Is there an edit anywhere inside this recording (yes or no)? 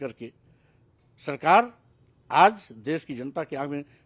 no